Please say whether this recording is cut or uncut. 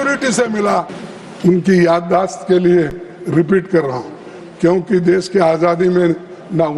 cut